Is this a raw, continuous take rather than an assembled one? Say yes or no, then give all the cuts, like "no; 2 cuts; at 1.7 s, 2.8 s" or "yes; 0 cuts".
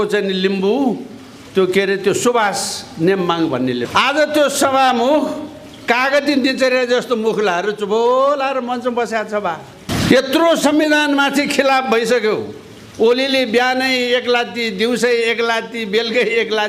no; 2 cuts; at 3.8 s, 9.9 s